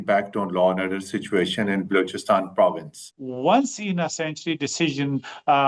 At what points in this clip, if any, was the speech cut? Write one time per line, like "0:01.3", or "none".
0:03.0